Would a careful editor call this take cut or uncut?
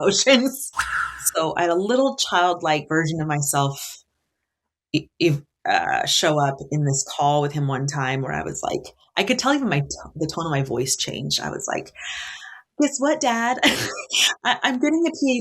cut